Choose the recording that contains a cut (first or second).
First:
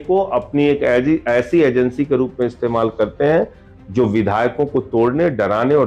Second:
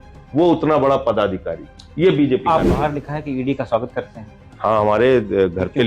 second